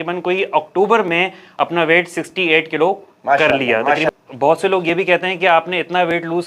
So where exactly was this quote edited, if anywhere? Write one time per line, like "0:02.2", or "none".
0:04.1